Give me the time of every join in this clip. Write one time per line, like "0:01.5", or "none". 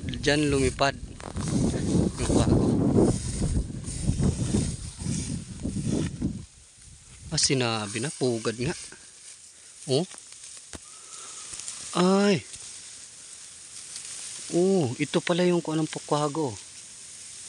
none